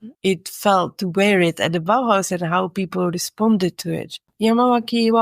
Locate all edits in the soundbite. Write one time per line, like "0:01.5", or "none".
0:04.3